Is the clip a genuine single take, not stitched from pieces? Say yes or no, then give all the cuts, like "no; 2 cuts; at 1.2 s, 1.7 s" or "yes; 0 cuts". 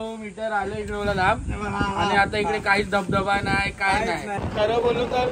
no; 1 cut; at 4.4 s